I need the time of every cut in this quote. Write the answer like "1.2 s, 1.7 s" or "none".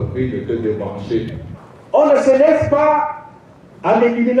1.5 s

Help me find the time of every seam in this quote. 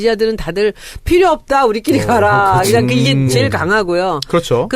3.7 s

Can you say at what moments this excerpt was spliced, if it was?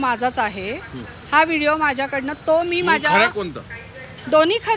none

